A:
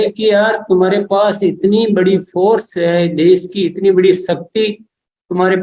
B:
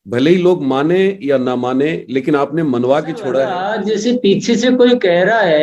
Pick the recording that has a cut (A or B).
B